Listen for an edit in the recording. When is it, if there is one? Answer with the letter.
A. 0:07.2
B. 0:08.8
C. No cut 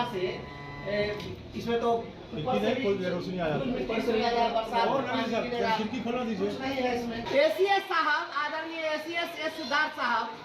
A